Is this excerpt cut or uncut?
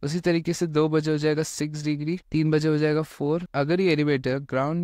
cut